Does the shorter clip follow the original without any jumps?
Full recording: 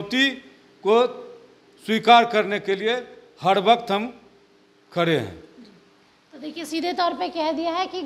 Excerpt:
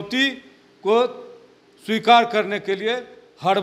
yes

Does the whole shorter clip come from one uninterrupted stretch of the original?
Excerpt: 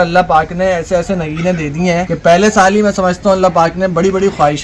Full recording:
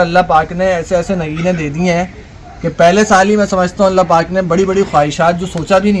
no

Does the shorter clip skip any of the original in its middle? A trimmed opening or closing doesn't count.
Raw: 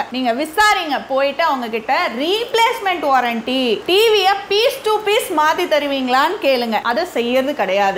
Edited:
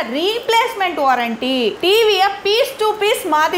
no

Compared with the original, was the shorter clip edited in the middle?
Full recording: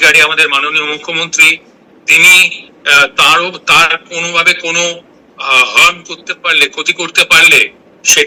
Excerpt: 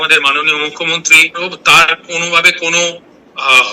yes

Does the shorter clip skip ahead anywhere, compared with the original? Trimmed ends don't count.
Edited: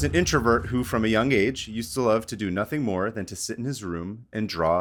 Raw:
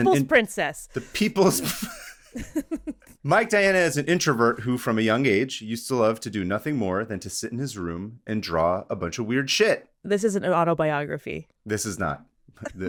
no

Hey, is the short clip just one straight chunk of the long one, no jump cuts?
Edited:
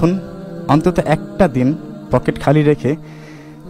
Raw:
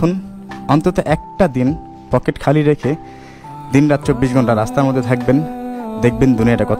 yes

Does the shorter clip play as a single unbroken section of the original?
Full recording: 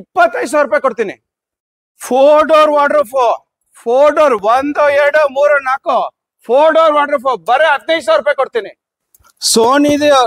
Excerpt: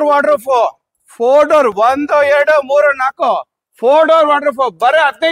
yes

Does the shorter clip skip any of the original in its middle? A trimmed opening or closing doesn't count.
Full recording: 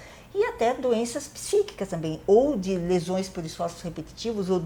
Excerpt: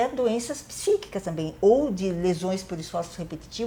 no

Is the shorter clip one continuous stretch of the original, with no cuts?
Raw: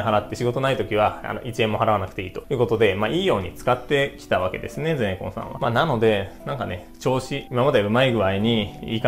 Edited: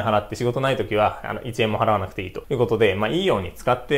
yes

